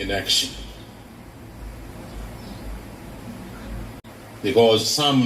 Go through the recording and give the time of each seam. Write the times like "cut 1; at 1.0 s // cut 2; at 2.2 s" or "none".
cut 1; at 4.0 s